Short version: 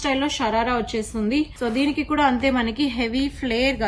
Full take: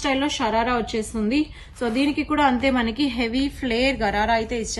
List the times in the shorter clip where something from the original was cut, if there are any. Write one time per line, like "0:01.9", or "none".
0:01.5